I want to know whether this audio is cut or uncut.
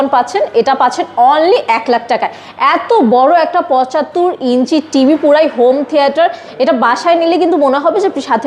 uncut